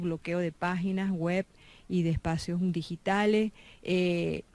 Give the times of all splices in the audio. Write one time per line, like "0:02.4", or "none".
none